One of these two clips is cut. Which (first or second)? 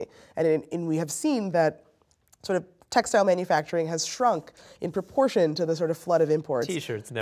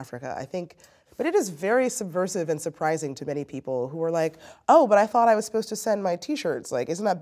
second